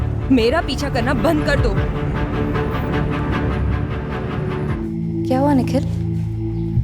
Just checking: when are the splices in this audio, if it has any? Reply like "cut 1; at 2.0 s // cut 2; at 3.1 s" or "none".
cut 1; at 4.7 s